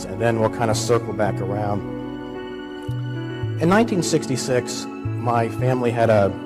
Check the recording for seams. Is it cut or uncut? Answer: cut